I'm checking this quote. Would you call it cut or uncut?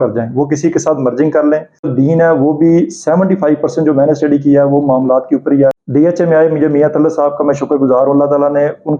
cut